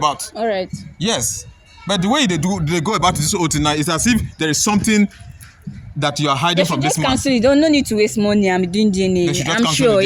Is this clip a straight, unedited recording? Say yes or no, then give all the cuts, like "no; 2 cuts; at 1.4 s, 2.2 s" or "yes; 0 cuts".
yes; 0 cuts